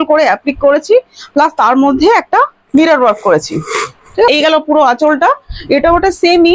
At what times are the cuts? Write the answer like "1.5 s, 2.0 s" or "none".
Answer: 4.3 s